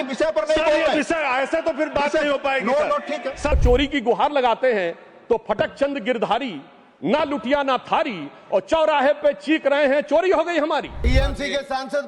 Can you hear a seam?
yes; 2 cuts; at 3.5 s, 11.1 s

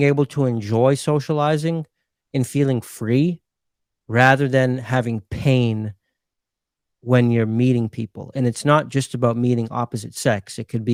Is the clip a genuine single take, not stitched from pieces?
yes; 0 cuts

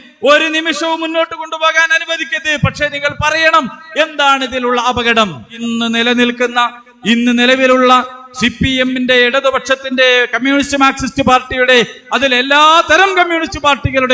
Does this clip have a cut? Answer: yes; 1 cut; at 5.6 s

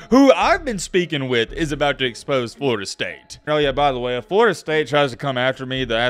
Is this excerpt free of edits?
no; 1 cut; at 3.4 s

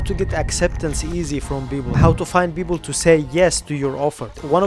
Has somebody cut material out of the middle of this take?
no; 0 cuts

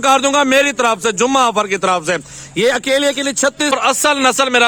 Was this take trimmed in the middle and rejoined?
yes; 1 cut; at 3.7 s

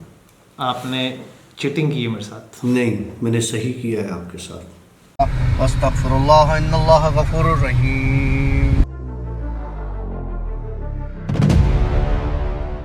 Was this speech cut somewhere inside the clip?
yes; 1 cut; at 5.1 s

